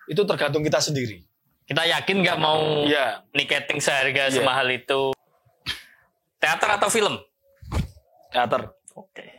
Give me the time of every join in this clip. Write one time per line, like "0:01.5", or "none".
0:05.2